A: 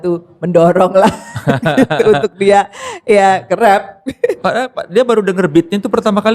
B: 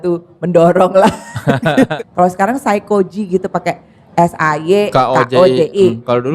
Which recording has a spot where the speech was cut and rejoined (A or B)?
B